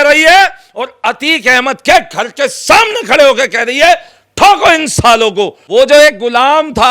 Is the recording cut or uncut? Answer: cut